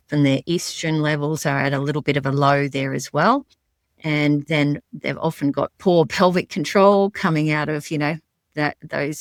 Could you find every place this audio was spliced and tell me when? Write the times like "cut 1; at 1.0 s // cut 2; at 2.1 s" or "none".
none

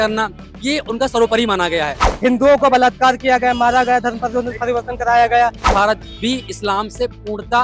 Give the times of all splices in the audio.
cut 1; at 2.0 s // cut 2; at 5.7 s

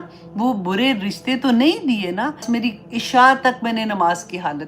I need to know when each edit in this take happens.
cut 1; at 2.4 s

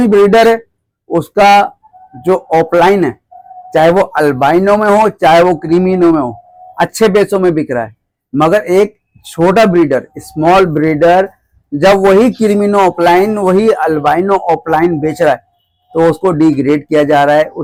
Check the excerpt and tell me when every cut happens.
none

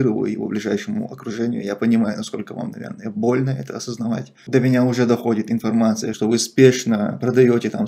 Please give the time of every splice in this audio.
cut 1; at 6.1 s

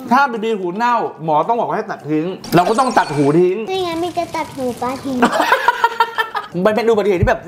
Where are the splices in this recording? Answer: cut 1; at 2.4 s // cut 2; at 5.2 s // cut 3; at 6.5 s

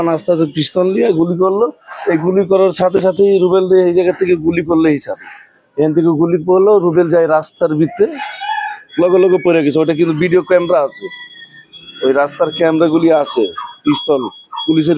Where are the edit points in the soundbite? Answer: none

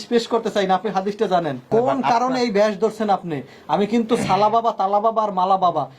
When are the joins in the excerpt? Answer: cut 1; at 1.6 s

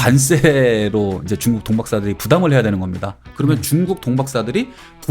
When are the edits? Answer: cut 1; at 3.3 s

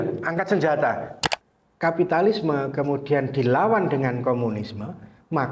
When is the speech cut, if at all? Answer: cut 1; at 1.1 s

